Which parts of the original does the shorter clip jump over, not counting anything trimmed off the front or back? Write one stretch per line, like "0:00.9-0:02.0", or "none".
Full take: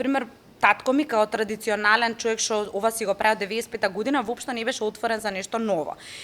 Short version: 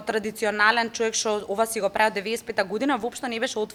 none